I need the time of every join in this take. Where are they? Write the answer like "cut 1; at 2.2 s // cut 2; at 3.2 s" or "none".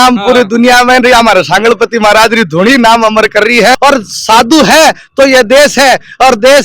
cut 1; at 3.7 s